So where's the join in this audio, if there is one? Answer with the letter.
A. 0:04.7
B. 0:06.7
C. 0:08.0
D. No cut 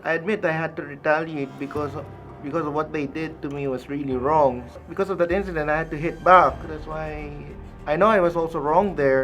A